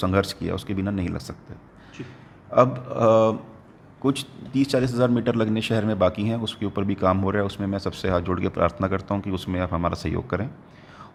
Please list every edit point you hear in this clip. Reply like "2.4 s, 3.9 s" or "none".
none